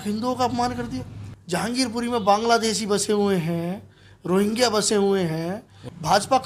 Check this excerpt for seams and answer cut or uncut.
uncut